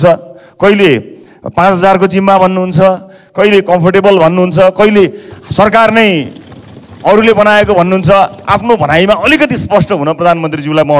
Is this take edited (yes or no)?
no